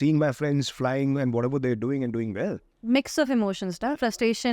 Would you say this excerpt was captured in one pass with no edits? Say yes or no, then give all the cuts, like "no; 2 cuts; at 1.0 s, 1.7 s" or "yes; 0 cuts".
yes; 0 cuts